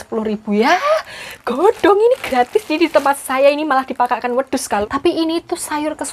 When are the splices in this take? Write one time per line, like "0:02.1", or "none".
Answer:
0:04.8